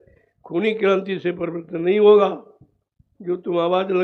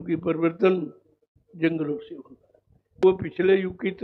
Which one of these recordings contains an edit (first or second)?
second